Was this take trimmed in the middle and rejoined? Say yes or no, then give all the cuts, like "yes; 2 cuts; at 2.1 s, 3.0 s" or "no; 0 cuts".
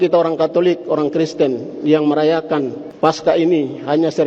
yes; 1 cut; at 2.8 s